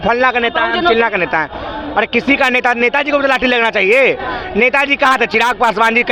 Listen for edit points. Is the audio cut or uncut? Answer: uncut